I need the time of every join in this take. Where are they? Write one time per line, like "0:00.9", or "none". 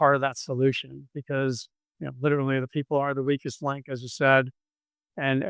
none